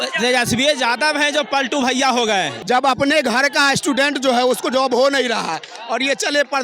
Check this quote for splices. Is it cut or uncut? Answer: cut